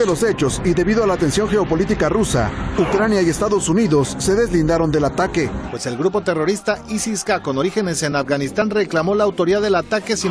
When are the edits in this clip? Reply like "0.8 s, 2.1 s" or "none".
5.7 s